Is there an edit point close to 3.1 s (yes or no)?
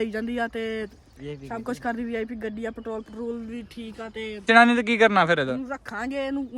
no